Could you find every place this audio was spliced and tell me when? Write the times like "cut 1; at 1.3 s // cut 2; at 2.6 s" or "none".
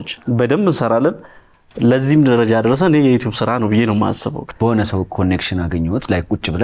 cut 1; at 4.4 s